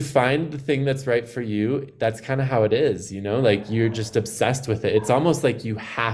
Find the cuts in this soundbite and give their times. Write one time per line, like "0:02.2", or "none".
none